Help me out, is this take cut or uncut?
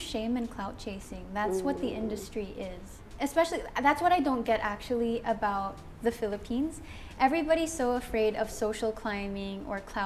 uncut